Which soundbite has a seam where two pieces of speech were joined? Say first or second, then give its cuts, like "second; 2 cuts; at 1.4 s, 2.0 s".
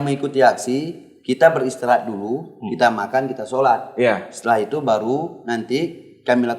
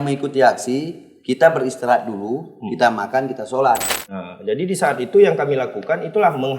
second; 1 cut; at 3.9 s